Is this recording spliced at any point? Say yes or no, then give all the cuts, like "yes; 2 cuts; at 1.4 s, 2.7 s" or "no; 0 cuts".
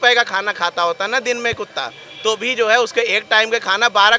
no; 0 cuts